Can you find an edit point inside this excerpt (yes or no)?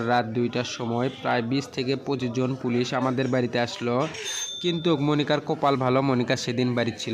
no